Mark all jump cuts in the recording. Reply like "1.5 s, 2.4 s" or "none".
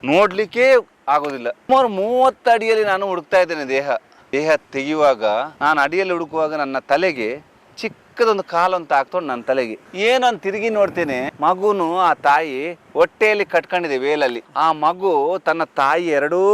1.6 s, 14.4 s